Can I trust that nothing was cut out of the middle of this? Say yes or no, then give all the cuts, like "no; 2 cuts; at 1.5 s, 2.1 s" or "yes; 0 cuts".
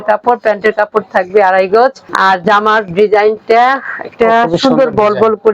no; 1 cut; at 2.0 s